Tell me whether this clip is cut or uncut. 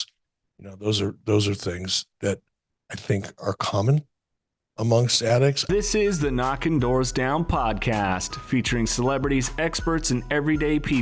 cut